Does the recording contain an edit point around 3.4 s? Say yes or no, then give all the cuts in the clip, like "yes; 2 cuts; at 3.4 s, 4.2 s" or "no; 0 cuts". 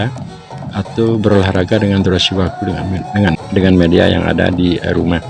yes; 1 cut; at 3.4 s